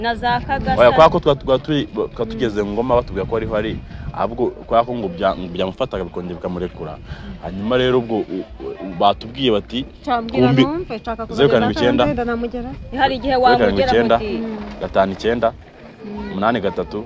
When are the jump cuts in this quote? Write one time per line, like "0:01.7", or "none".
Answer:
none